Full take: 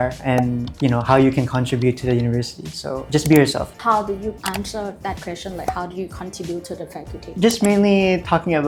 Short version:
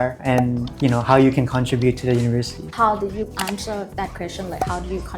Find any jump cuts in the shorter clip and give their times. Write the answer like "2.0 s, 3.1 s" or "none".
2.6 s